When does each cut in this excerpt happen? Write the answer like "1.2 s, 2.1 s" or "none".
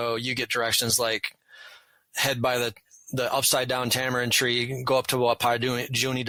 none